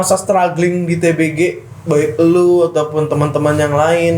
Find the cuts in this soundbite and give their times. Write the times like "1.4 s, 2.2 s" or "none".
none

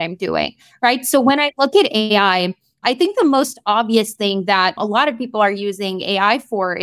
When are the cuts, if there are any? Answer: 4.8 s

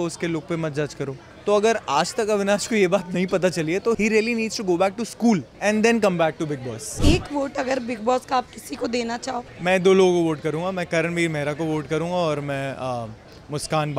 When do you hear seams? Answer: 1.3 s, 4.0 s, 5.5 s, 6.9 s, 9.5 s

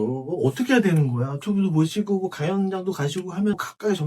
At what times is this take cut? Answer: 1.4 s

